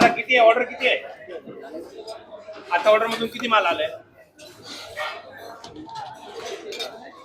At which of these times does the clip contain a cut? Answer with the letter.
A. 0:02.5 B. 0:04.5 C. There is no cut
C